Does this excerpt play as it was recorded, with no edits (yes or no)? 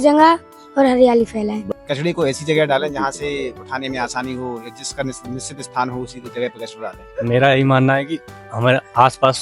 no